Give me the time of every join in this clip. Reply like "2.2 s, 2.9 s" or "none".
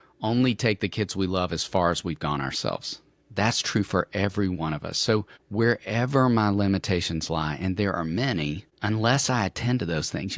5.4 s, 8.7 s